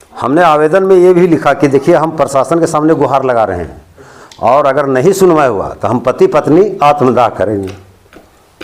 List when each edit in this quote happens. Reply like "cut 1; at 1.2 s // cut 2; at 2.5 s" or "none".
none